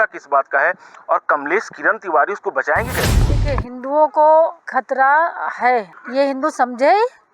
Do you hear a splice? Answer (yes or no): yes